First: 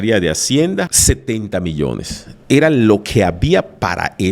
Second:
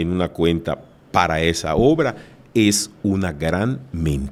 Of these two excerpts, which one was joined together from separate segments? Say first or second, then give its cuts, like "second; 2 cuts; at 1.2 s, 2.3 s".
first; 1 cut; at 0.9 s